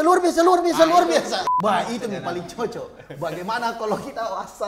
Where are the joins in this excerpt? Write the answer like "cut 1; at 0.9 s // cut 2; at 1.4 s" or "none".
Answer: cut 1; at 1.5 s